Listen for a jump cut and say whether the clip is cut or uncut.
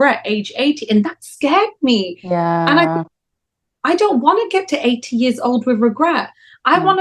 uncut